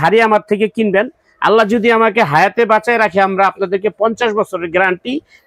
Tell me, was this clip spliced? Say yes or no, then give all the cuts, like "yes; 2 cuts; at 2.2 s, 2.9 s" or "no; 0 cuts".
no; 0 cuts